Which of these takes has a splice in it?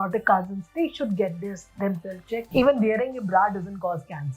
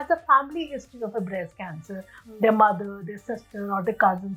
first; 1 cut; at 2.5 s

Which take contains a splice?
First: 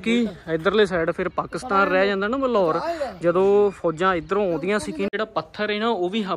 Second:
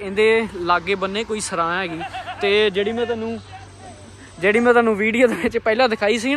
first; 1 cut; at 5.1 s

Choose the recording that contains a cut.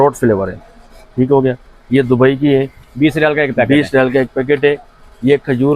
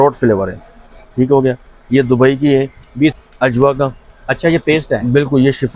second; 1 cut; at 3.1 s

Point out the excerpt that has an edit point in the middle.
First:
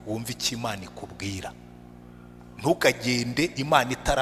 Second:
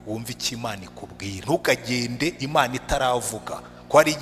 second; 1 cut; at 1.4 s

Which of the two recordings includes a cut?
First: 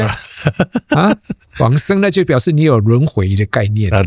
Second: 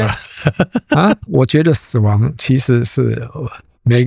second; 1 cut; at 1.2 s

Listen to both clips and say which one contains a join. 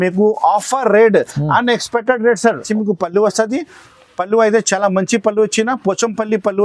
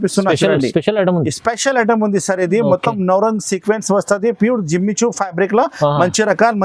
first; 1 cut; at 2.7 s

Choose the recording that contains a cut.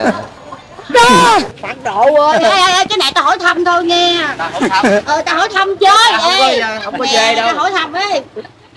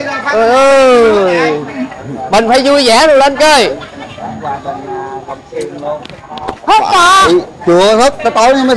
first; 1 cut; at 1.6 s

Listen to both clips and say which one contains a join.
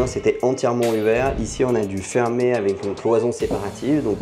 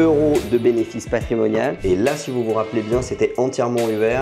second; 1 cut; at 1.8 s

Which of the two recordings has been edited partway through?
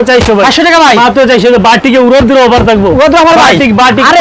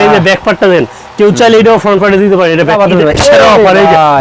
second; 1 cut; at 2.7 s

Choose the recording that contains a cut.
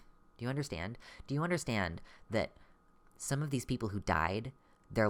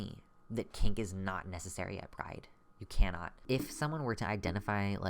second; 1 cut; at 3.5 s

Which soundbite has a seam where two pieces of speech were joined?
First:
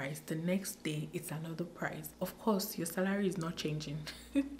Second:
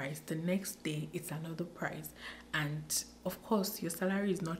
first; 1 cut; at 2.1 s

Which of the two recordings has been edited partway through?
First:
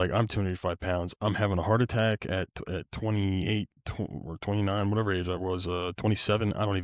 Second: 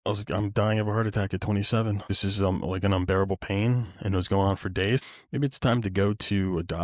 second; 2 cuts; at 2.1 s, 5.0 s

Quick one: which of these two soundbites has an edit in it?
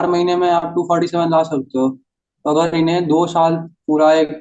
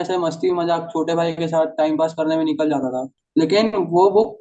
second; 1 cut; at 3.1 s

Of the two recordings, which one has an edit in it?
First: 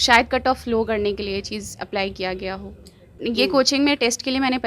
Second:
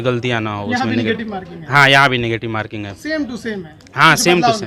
first; 1 cut; at 3.1 s

